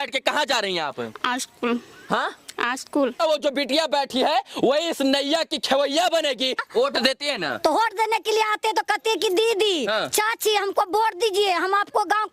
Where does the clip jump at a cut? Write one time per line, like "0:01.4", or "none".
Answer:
0:03.2
0:06.6